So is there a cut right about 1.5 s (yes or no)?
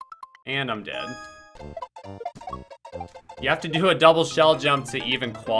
yes